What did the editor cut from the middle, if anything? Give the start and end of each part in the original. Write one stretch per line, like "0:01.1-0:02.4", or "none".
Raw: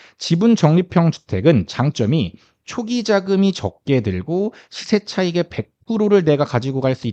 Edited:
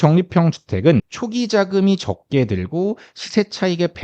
0:01.7-0:02.7